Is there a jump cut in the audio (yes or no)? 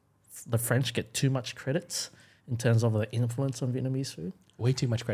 no